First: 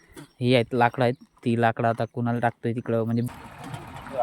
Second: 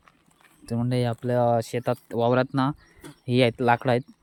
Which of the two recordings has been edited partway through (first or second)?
first